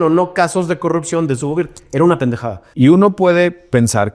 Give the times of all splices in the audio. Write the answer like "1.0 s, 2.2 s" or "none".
2.6 s

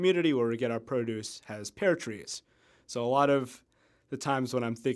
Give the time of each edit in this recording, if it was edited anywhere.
none

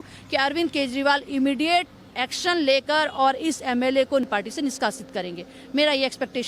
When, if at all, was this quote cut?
4.2 s

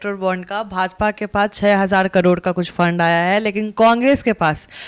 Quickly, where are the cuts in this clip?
none

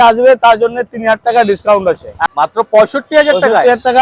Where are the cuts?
2.1 s

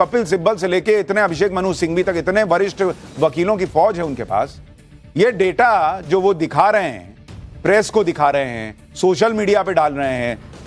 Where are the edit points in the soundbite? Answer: 3.2 s

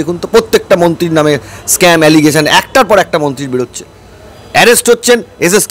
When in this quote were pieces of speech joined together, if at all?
none

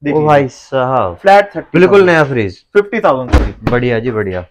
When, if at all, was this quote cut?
none

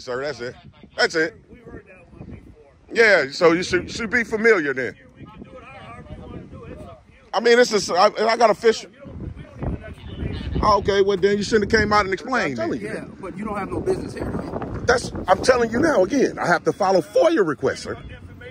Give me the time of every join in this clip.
12.7 s

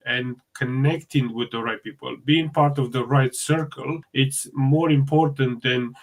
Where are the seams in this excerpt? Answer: none

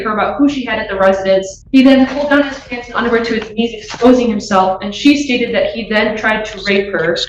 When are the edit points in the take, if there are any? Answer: 1.6 s

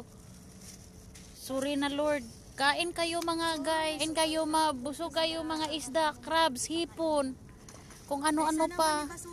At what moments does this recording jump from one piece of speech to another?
1.4 s, 4.0 s

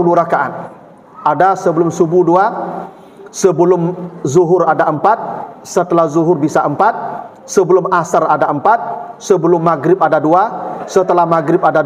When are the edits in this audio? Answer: none

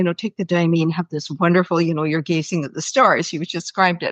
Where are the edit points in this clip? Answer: none

